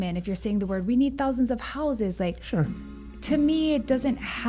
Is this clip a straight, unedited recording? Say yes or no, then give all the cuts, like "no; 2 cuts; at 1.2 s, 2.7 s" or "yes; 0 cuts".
yes; 0 cuts